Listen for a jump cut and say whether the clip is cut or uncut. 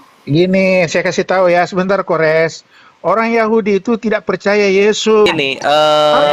cut